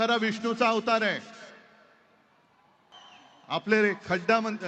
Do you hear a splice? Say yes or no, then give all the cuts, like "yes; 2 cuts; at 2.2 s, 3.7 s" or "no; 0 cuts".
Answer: yes; 1 cut; at 2.9 s